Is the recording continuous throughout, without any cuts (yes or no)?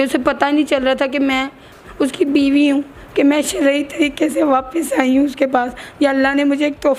yes